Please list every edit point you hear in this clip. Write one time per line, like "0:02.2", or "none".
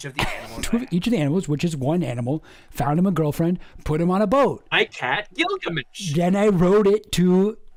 none